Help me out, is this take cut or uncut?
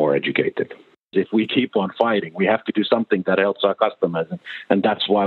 cut